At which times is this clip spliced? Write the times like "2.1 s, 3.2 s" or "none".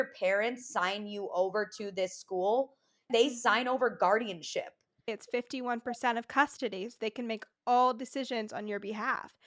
3.1 s, 5.1 s